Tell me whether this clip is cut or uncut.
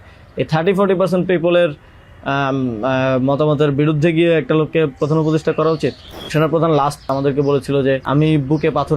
cut